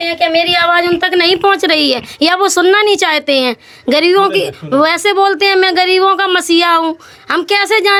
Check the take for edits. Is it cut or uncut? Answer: uncut